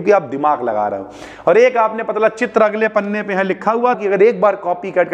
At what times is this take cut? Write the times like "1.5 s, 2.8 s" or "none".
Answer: 4.0 s

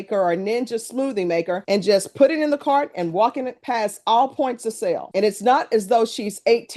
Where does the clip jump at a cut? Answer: none

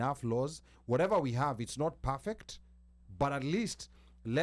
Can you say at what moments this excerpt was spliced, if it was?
none

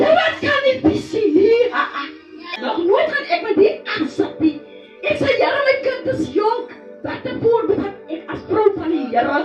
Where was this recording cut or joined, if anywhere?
2.4 s

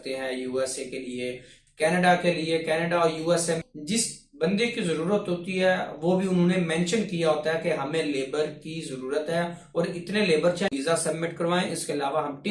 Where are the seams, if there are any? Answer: 3.6 s, 10.7 s

